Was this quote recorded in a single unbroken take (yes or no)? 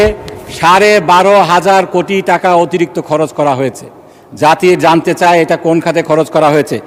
yes